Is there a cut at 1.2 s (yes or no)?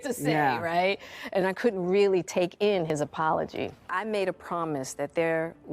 no